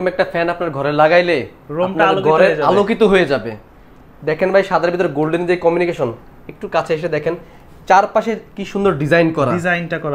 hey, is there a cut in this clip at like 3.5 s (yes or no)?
no